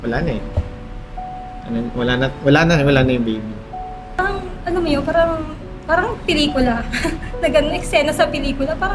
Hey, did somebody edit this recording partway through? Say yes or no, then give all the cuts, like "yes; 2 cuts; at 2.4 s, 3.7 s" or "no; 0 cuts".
yes; 1 cut; at 4.2 s